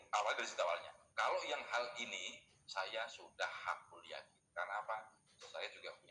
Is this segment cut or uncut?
cut